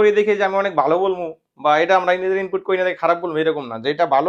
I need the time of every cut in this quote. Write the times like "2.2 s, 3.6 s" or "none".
none